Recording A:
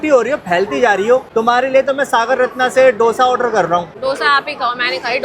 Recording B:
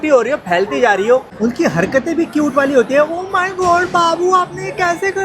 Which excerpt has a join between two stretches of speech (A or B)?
B